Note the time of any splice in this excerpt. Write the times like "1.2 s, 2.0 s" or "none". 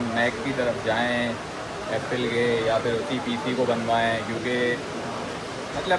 none